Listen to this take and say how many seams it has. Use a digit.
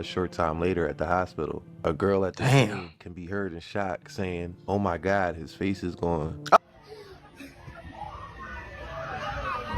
2